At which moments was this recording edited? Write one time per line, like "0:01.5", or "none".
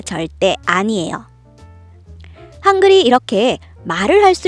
0:01.9